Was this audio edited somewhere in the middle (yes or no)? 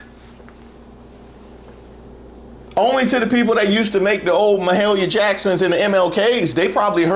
yes